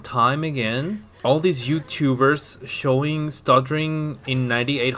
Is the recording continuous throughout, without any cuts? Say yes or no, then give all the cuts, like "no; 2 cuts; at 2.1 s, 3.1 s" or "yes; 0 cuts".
no; 1 cut; at 1.1 s